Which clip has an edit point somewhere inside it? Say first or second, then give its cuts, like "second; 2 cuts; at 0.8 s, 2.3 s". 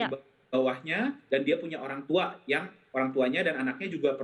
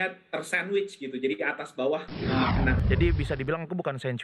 second; 1 cut; at 2.8 s